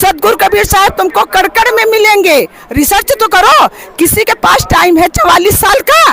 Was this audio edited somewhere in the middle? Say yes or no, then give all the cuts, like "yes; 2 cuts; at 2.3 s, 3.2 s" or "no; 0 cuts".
no; 0 cuts